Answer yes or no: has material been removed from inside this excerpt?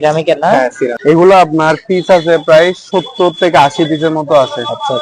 yes